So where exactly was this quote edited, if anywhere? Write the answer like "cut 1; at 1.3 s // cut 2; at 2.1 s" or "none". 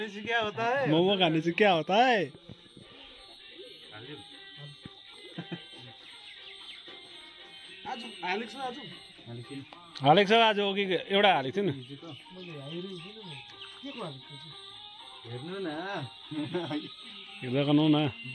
none